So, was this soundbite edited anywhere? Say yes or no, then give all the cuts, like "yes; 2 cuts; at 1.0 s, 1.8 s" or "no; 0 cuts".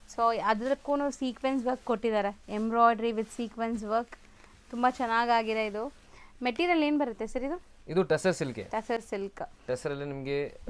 no; 0 cuts